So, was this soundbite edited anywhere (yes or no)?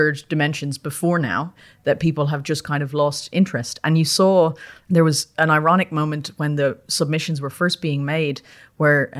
yes